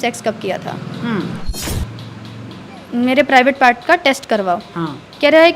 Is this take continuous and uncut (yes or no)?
no